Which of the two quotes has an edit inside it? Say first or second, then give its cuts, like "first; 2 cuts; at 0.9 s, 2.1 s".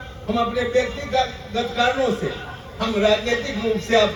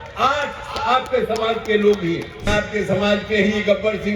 second; 1 cut; at 2.5 s